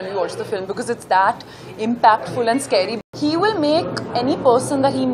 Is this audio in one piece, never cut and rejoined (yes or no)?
no